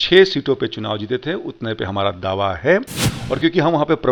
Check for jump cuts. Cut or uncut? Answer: uncut